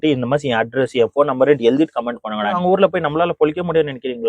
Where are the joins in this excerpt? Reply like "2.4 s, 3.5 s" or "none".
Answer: 2.6 s